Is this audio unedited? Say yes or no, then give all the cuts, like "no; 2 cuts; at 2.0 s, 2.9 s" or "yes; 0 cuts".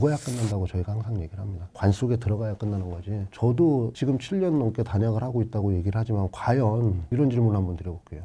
yes; 0 cuts